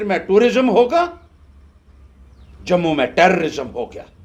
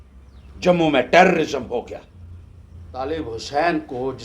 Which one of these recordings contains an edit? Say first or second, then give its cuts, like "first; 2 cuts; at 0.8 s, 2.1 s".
second; 1 cut; at 3.2 s